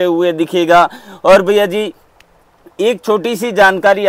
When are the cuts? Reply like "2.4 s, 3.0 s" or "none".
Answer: none